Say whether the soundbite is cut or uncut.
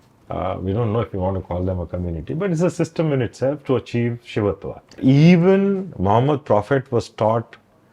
cut